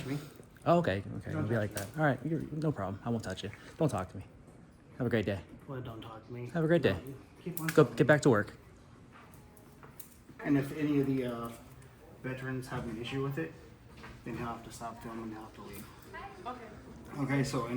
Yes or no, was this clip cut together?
yes